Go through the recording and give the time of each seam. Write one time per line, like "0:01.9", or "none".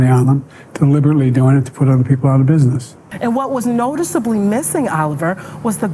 0:03.0